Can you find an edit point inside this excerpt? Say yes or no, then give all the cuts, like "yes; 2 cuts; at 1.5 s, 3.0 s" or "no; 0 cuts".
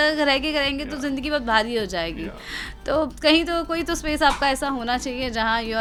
no; 0 cuts